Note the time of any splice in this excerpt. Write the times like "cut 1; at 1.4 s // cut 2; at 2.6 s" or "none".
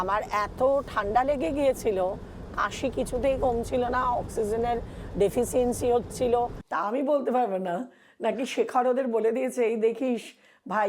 cut 1; at 6.6 s